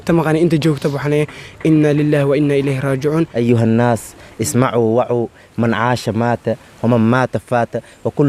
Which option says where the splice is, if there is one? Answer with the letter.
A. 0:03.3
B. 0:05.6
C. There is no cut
A